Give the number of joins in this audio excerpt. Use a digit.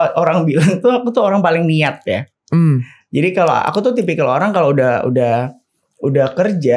0